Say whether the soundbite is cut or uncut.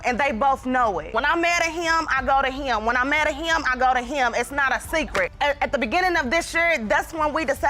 uncut